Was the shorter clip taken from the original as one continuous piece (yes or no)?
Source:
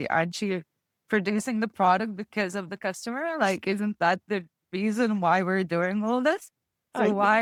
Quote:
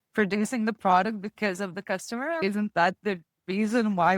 no